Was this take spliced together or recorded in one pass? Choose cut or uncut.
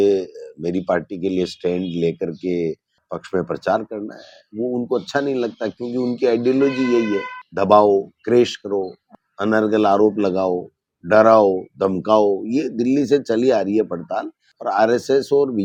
uncut